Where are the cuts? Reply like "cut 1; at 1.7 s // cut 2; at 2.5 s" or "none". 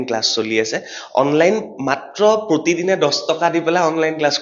none

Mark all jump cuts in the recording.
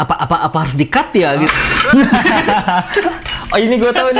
cut 1; at 1.5 s

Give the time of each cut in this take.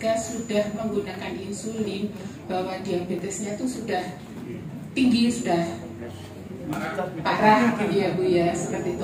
none

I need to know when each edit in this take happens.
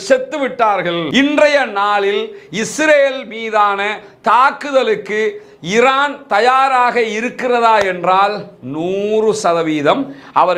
cut 1; at 1.0 s

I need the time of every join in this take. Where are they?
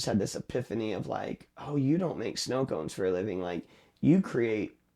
none

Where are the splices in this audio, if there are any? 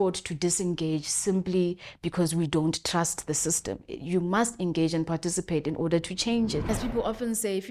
cut 1; at 6.6 s

